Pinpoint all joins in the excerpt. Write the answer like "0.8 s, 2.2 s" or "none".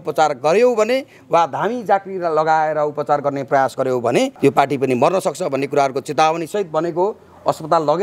none